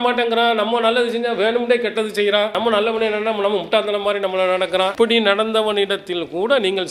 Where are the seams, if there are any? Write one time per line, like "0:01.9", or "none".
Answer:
none

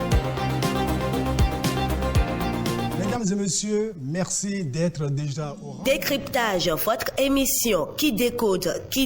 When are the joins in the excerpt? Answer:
0:02.5

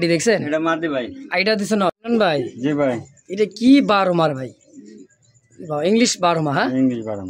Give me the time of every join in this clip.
0:02.0

